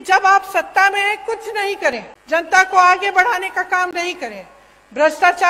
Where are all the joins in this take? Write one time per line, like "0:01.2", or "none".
0:02.1